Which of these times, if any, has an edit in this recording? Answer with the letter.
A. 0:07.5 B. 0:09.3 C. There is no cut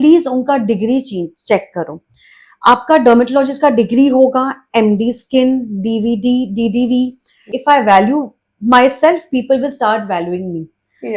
A